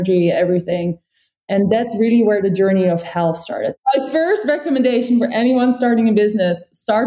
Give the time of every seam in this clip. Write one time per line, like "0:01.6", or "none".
0:03.7